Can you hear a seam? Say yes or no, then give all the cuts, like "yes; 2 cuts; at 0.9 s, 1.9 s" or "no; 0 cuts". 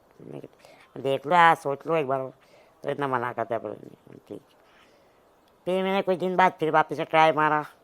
no; 0 cuts